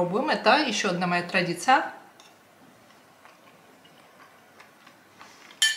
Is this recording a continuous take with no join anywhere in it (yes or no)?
yes